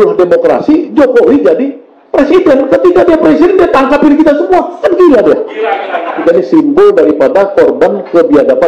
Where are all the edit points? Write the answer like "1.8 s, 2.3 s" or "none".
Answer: 6.2 s